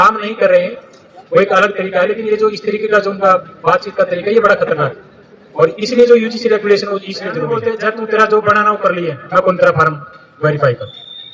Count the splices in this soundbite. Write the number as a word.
one